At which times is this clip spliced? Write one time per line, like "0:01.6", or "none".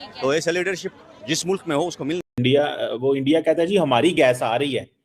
0:02.3